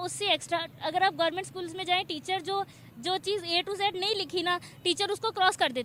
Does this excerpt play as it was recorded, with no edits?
yes; 0 cuts

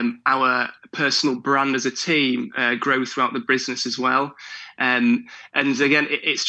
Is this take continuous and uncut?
yes; 0 cuts

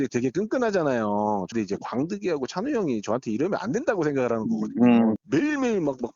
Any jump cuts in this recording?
yes; 2 cuts; at 1.5 s, 5.2 s

